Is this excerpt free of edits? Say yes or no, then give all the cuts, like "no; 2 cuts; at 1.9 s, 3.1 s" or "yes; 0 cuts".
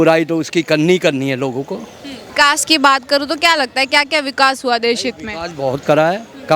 no; 1 cut; at 2.3 s